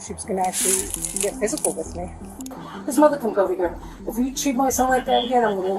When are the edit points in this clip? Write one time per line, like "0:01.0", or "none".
0:02.5